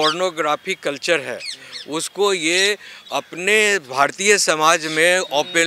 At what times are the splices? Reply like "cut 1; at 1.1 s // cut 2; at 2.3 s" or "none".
none